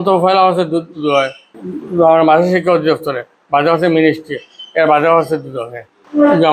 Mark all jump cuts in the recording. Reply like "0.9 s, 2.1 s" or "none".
none